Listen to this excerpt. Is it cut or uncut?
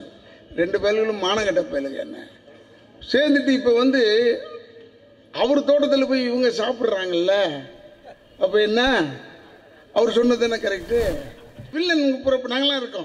cut